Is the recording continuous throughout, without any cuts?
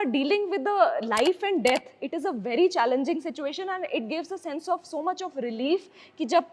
yes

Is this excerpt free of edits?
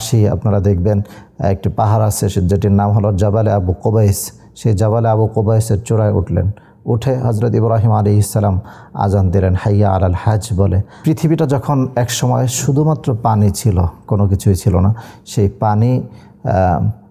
no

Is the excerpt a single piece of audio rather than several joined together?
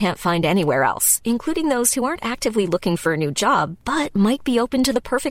yes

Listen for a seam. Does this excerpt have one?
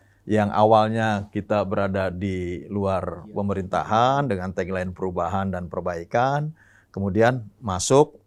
no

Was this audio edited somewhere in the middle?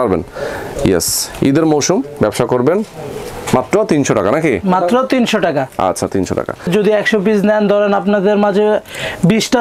yes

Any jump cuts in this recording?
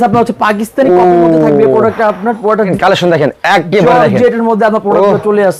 yes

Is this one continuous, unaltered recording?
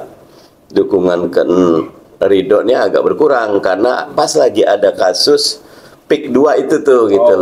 yes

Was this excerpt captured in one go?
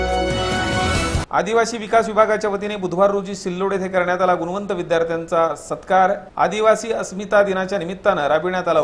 no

